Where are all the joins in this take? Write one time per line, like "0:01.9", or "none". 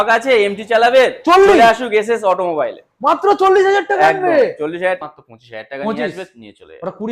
0:05.0

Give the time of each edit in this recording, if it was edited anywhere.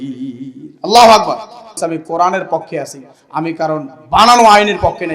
0:01.8

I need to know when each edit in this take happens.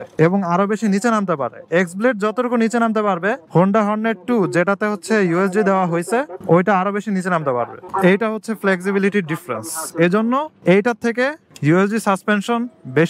none

